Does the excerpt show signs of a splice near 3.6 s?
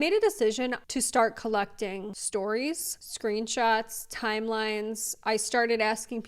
no; 2 cuts; at 0.8 s, 2.2 s

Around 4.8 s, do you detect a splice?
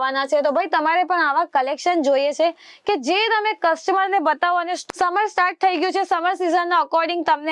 yes; 1 cut; at 4.8 s

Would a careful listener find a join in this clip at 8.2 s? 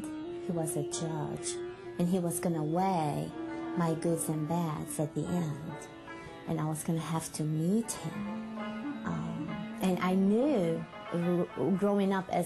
yes; 1 cut; at 8.2 s

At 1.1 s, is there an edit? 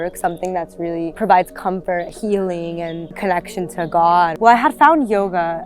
yes; 3 cuts; at 1.1 s, 3.1 s, 4.3 s

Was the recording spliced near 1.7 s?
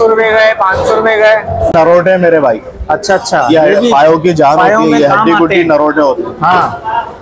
yes; 1 cut; at 1.7 s

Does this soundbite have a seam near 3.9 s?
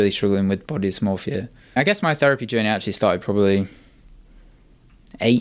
no; 1 cut; at 1.7 s

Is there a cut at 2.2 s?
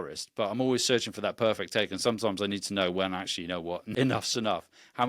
no; 1 cut; at 3.9 s

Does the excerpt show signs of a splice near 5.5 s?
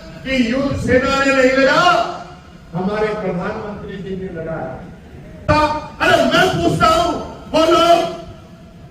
yes; 1 cut; at 5.5 s

